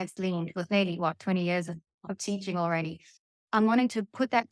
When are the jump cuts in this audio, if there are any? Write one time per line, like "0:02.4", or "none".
none